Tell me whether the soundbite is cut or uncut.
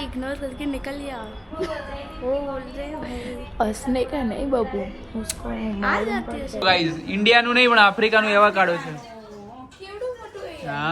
cut